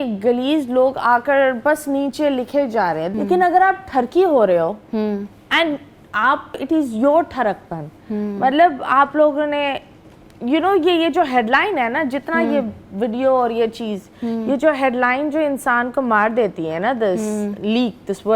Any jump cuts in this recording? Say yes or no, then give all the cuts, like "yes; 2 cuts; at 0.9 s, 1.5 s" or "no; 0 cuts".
yes; 2 cuts; at 3.1 s, 6.6 s